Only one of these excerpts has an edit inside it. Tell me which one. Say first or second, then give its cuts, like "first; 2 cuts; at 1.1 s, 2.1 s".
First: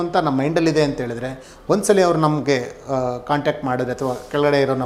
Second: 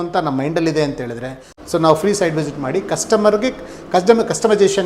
second; 1 cut; at 1.5 s